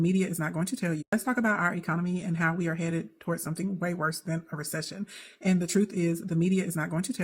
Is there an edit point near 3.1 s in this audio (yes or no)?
no